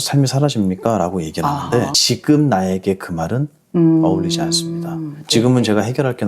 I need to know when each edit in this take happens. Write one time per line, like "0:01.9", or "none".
0:02.0